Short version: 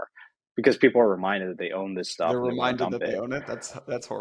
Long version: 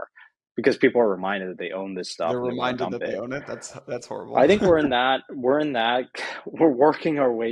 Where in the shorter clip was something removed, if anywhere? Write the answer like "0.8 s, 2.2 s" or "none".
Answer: none